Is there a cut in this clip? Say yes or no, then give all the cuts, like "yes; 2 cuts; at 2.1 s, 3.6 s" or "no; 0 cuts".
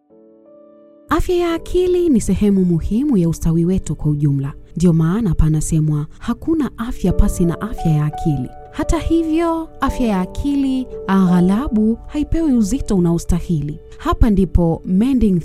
yes; 1 cut; at 1.1 s